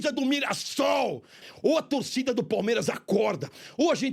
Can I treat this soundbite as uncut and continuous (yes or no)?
no